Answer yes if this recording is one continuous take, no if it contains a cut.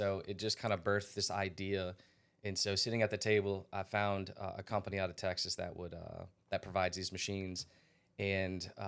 yes